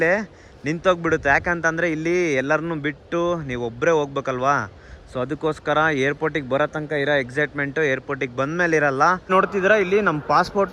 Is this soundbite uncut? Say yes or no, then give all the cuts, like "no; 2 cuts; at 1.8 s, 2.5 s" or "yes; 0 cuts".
yes; 0 cuts